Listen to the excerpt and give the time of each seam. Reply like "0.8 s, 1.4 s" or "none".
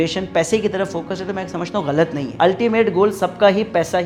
none